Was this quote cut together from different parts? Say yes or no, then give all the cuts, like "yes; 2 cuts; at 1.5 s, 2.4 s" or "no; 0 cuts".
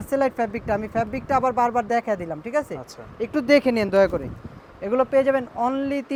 no; 0 cuts